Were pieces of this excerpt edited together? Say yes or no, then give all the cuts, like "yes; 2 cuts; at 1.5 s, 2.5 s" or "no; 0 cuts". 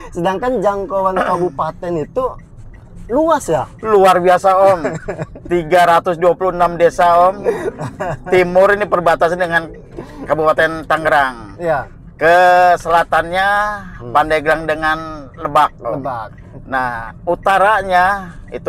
no; 0 cuts